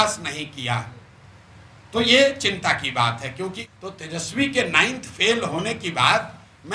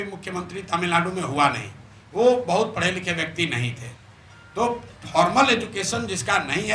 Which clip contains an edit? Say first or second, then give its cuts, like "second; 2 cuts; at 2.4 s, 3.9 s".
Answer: first; 1 cut; at 3.7 s